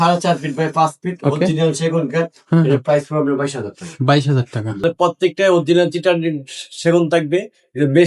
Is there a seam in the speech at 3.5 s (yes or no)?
no